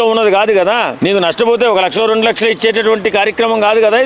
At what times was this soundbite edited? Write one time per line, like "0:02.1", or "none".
0:00.9